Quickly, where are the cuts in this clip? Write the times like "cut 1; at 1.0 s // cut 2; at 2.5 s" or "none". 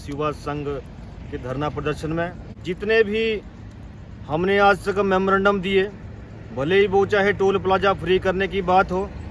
cut 1; at 2.5 s